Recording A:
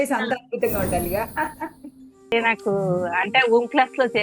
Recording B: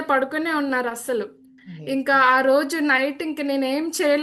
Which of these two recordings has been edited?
A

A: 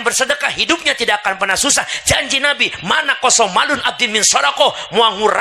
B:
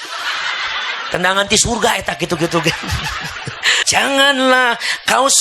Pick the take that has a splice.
B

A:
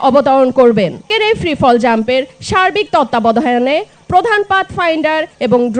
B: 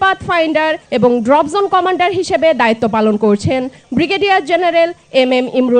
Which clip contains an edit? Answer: A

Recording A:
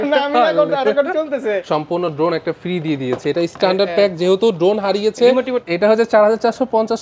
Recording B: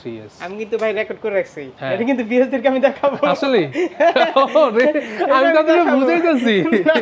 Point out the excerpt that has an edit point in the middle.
A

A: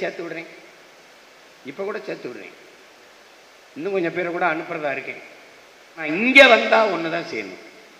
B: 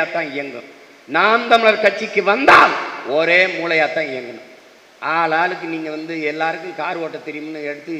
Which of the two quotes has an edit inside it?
A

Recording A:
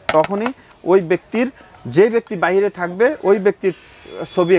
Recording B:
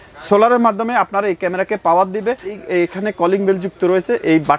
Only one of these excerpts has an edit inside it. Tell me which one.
B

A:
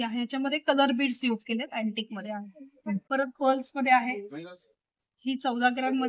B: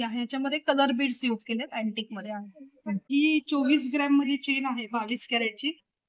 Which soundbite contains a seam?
B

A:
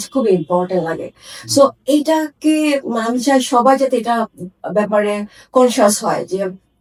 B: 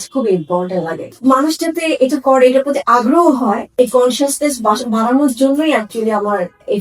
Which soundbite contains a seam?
B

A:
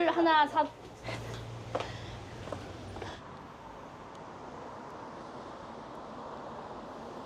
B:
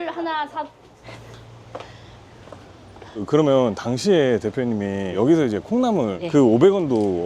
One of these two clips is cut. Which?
B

